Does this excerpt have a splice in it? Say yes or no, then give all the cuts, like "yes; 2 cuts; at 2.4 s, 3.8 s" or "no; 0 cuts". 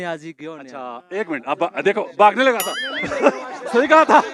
no; 0 cuts